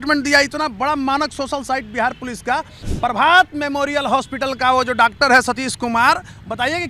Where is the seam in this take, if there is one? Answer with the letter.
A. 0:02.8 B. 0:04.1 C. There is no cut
A